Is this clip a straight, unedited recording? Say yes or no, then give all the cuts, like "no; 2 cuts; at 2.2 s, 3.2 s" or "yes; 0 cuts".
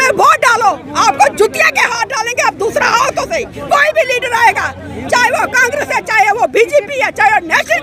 yes; 0 cuts